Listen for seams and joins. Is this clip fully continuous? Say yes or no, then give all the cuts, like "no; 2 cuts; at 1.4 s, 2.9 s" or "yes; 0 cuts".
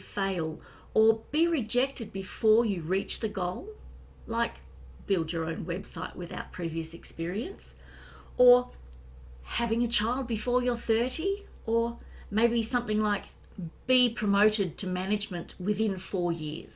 yes; 0 cuts